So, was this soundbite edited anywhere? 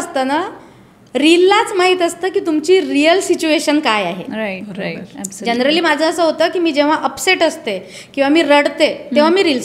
no; 0 cuts

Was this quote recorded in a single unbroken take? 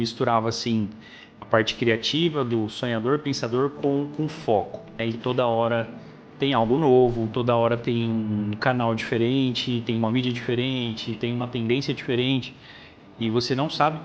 no; 1 cut; at 5.0 s

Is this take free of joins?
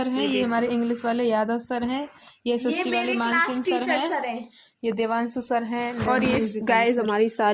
yes; 0 cuts

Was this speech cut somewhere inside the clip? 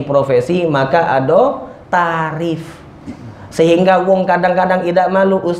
no; 0 cuts

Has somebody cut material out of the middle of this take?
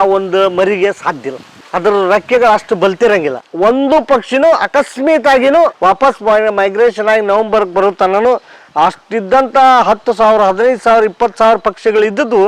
yes; 2 cuts; at 3.4 s, 5.8 s

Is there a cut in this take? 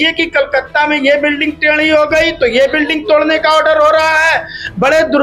no; 0 cuts

